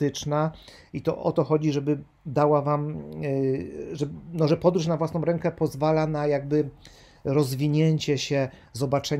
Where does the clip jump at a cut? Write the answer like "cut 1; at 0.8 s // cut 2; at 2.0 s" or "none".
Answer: none